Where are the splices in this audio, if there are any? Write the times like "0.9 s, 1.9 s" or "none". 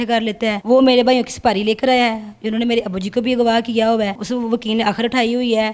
4.1 s